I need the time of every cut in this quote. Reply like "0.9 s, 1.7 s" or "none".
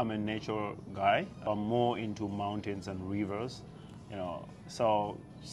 1.3 s